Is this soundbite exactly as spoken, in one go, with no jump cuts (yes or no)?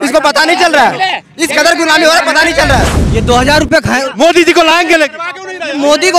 no